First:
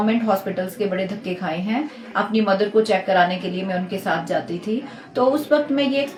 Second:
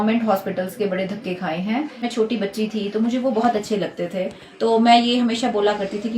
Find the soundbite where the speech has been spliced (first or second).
second